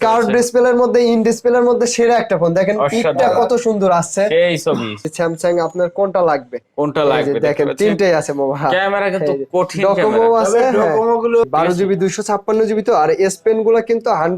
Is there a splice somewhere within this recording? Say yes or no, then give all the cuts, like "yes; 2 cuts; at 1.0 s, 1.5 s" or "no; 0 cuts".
yes; 2 cuts; at 5.0 s, 11.4 s